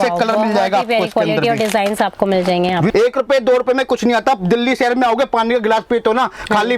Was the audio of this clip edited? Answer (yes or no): yes